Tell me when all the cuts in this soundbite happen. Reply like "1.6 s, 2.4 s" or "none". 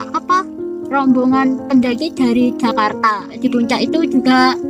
3.4 s

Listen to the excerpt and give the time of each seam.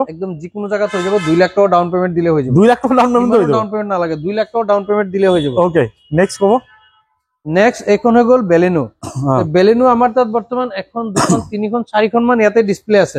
none

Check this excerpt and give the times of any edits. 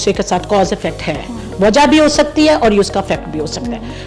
none

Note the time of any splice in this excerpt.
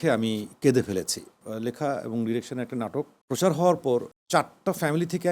1.4 s, 3.2 s, 4.2 s

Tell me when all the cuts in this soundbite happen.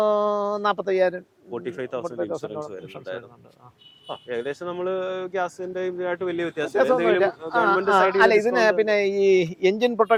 none

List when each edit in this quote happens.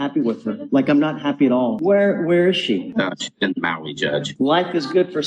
1.8 s, 4.3 s

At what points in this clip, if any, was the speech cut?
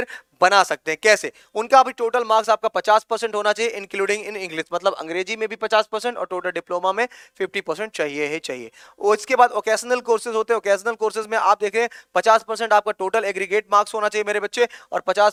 none

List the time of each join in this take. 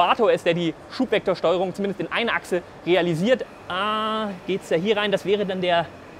3.4 s

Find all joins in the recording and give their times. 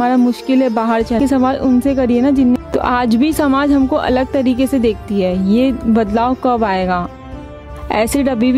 1.2 s, 2.6 s

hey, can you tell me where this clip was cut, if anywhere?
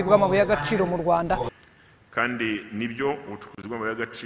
1.5 s

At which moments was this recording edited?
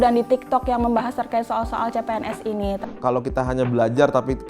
2.8 s

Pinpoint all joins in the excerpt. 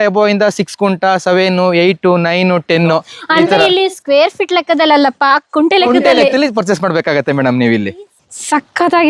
8.2 s

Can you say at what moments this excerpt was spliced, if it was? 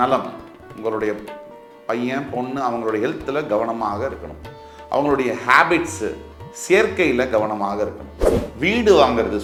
none

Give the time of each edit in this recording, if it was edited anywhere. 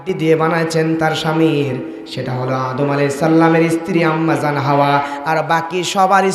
none

